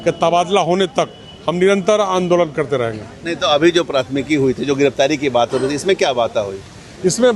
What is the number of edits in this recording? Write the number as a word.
zero